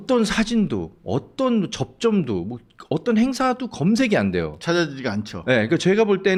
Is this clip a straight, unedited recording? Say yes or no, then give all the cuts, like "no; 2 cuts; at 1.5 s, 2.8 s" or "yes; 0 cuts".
yes; 0 cuts